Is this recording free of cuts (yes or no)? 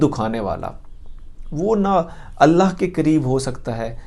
yes